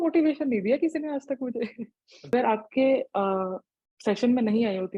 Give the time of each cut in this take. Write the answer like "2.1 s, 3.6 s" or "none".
2.3 s